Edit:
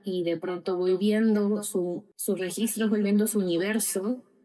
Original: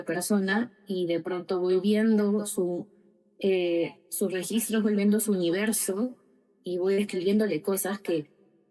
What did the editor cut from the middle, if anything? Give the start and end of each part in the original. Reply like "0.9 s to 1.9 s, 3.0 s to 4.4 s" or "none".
2.9 s to 4.0 s